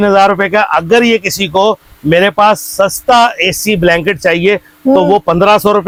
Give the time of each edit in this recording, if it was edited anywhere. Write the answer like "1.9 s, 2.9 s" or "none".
none